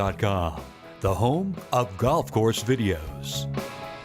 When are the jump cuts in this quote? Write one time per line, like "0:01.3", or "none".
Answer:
0:03.1